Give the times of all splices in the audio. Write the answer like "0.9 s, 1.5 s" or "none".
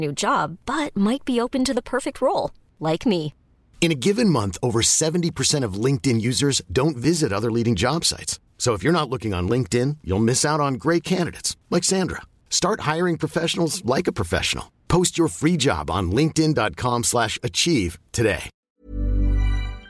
18.5 s